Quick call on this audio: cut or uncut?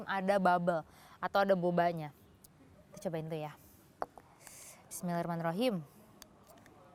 uncut